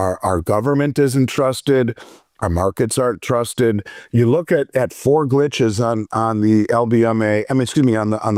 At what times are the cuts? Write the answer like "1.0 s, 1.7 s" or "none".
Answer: none